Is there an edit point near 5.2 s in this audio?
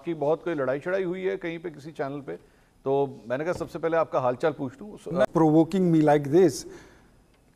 yes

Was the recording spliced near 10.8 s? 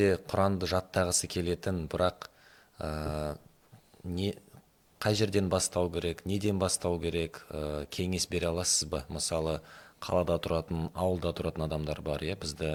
no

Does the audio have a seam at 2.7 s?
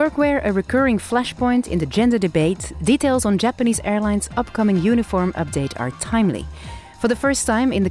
yes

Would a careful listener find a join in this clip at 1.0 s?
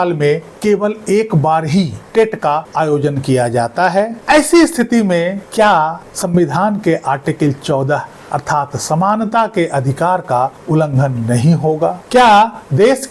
no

